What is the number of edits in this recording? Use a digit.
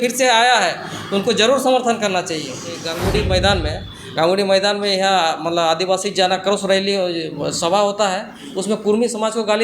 1